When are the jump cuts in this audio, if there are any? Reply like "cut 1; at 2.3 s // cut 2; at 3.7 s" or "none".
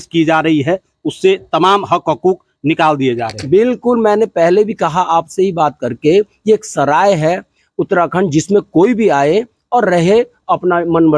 none